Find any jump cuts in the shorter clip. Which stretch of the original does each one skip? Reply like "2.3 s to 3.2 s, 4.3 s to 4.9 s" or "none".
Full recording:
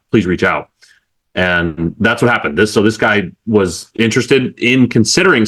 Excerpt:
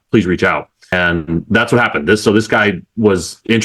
0.9 s to 1.4 s